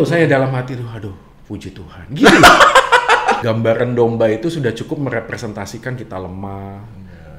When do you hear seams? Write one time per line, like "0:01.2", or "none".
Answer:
0:03.4